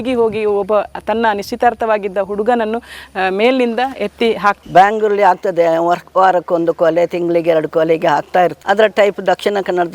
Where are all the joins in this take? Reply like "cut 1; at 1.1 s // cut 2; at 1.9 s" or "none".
cut 1; at 4.6 s // cut 2; at 8.6 s